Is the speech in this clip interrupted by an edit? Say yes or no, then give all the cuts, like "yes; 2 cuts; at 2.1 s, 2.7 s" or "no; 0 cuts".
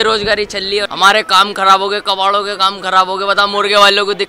yes; 1 cut; at 0.9 s